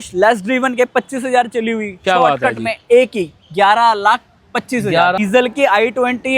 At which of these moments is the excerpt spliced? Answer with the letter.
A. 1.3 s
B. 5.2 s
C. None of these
B